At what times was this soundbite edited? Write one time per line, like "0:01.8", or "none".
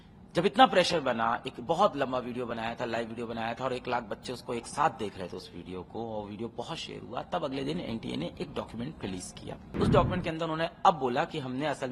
0:09.7